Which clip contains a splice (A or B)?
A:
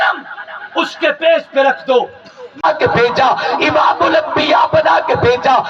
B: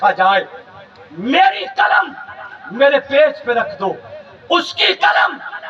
A